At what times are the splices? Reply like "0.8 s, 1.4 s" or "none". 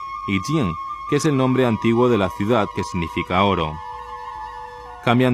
none